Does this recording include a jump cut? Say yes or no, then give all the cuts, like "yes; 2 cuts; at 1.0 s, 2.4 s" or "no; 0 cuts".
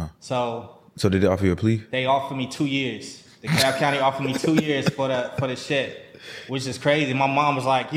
no; 0 cuts